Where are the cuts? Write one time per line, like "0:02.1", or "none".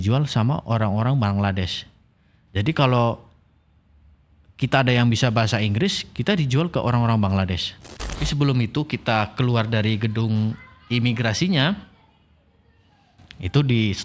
0:08.2